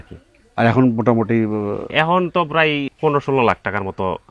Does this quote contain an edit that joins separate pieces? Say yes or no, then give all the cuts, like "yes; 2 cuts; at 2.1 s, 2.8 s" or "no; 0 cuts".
yes; 1 cut; at 2.9 s